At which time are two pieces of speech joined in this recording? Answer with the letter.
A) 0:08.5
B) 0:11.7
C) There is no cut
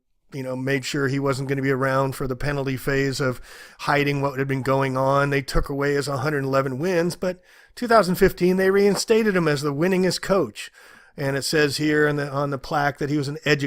A